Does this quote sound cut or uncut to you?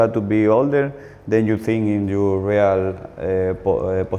uncut